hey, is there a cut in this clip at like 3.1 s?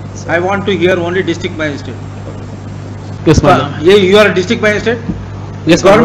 yes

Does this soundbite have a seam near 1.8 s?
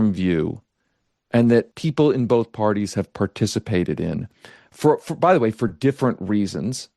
yes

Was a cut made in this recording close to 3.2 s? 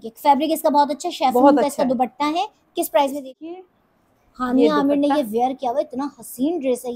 yes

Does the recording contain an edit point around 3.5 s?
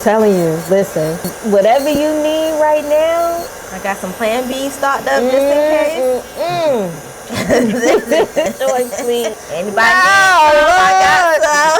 no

